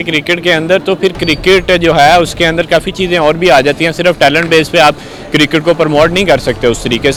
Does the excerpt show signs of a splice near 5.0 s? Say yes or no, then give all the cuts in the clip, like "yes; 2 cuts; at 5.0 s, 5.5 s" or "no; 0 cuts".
no; 0 cuts